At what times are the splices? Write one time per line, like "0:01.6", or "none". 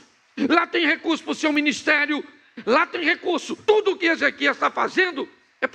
0:03.5

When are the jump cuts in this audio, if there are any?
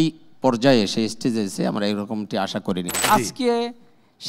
0:02.9

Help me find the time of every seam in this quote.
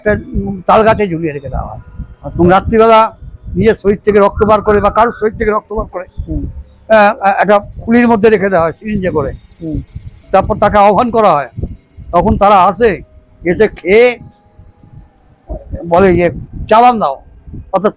none

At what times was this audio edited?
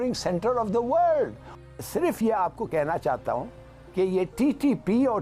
0:01.5

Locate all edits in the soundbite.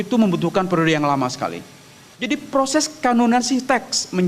0:02.1

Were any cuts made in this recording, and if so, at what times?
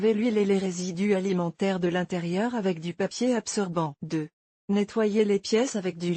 0:03.9

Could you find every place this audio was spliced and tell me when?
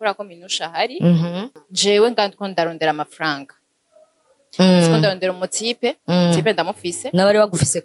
0:01.5

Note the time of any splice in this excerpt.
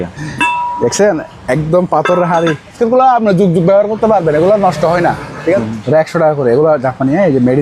0:02.8
0:05.3

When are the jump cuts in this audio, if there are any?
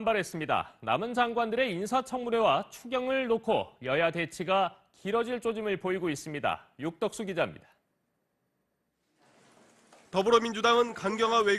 none

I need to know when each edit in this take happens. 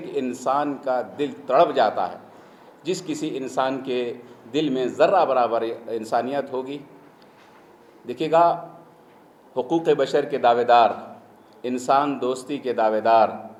none

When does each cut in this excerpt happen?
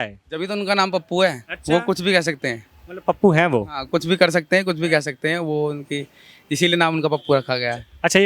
none

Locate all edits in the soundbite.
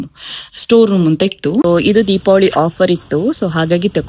0:01.6

